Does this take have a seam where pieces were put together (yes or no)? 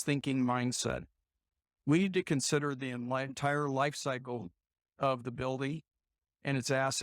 no